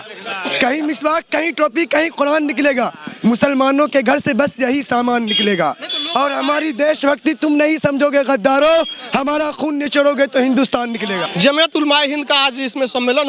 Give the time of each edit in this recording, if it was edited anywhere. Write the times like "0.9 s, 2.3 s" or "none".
none